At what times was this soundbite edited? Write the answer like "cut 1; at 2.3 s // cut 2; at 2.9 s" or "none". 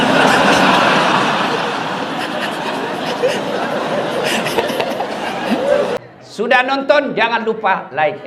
cut 1; at 6.0 s